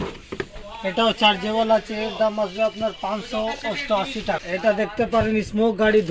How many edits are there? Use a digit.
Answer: 1